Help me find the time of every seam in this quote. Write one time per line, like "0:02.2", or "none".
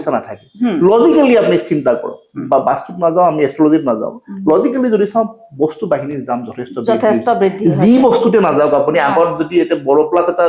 none